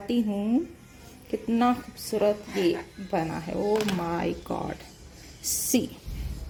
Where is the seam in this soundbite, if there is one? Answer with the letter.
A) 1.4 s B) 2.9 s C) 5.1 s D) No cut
D